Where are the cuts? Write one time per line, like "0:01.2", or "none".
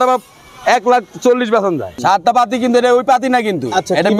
0:02.0